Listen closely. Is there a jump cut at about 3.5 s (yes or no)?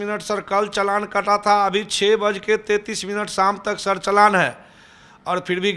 no